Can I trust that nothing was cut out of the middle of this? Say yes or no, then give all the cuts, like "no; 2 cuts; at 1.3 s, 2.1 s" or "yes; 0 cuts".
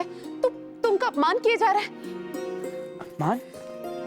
yes; 0 cuts